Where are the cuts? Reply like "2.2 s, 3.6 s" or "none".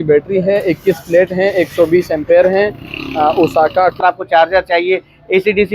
4.0 s